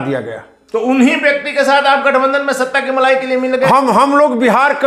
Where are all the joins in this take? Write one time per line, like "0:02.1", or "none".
none